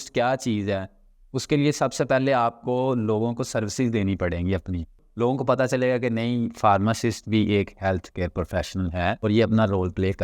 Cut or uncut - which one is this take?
cut